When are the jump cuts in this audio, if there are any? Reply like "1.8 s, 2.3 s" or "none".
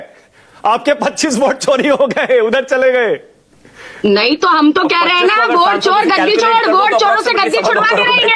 none

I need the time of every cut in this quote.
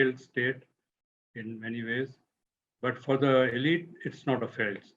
none

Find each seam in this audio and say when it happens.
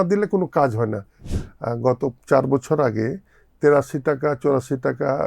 1.3 s

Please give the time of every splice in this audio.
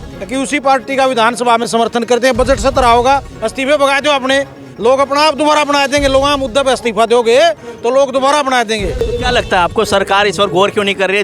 9.0 s

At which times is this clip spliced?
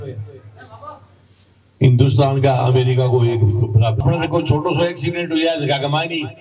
4.0 s

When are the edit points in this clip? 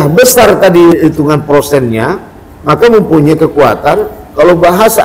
0.9 s

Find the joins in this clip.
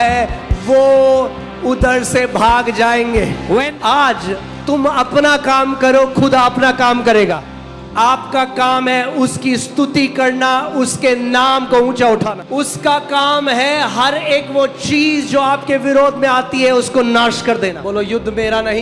3.7 s, 7.4 s, 12.3 s, 17.8 s

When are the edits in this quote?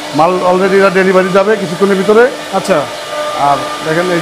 none

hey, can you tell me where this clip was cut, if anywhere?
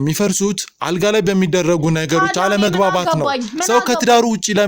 none

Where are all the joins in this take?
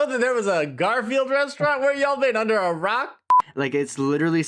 3.3 s

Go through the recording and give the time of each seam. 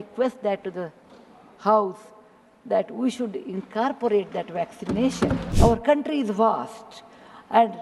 5.5 s

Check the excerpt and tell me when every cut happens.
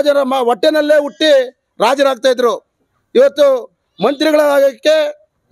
none

